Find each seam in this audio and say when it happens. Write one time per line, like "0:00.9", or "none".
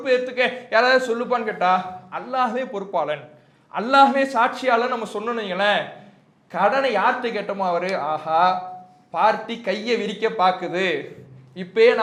none

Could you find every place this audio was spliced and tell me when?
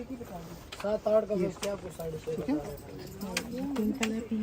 none

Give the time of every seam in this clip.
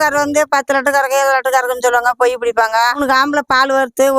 0:03.0

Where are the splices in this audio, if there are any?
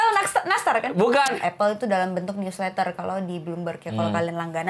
0:01.4

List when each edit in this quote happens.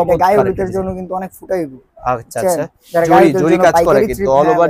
none

